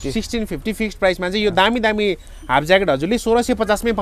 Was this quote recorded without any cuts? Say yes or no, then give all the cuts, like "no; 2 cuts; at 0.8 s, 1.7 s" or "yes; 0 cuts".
yes; 0 cuts